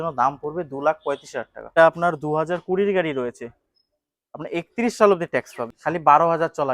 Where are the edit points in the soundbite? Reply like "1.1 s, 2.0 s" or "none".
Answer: 1.7 s, 5.8 s